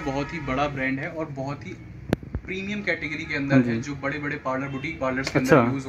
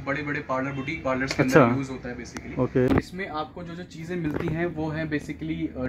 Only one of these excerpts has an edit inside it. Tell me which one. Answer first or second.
second